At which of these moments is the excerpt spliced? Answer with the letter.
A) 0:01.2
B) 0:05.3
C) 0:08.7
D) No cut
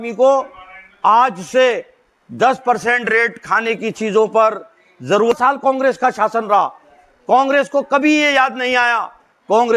B